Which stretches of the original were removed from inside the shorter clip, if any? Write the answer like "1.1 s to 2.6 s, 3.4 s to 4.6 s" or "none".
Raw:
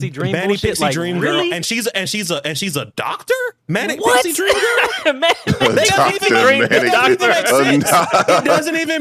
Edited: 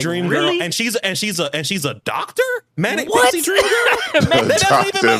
5.2 s to 5.6 s